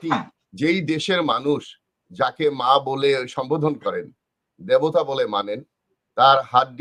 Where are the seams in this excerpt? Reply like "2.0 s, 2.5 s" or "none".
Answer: none

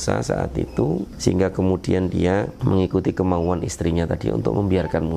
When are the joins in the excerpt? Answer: 1.1 s, 2.5 s

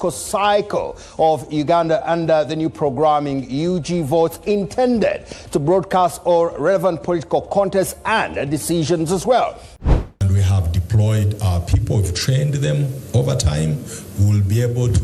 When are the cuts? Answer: 9.6 s

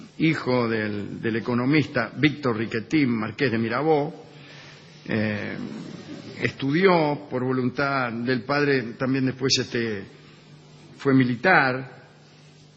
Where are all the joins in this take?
1.1 s

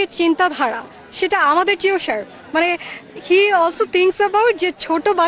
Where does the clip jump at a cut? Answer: none

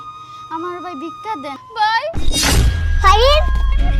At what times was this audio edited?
1.6 s

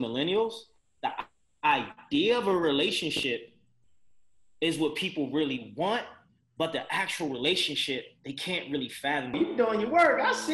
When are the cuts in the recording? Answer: 9.3 s

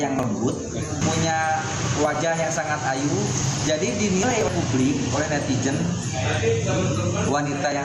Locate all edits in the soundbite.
1.0 s

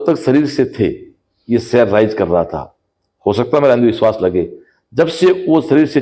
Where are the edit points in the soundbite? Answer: none

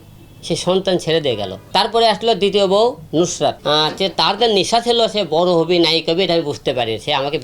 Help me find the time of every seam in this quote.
1.5 s, 3.6 s

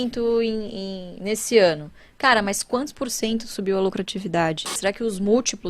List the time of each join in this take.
4.8 s

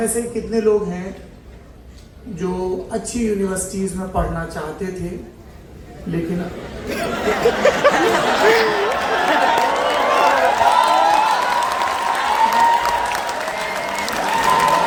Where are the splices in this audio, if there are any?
none

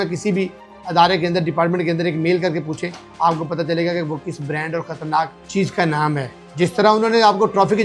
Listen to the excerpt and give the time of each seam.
5.4 s, 6.4 s

